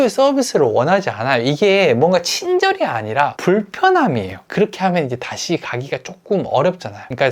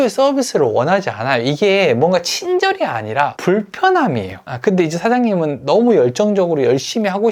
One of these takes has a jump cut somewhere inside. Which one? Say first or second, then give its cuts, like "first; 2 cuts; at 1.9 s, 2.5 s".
first; 1 cut; at 4.5 s